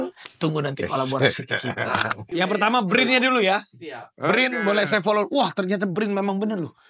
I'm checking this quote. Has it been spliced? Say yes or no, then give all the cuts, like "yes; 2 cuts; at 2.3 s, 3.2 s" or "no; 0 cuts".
yes; 1 cut; at 1.8 s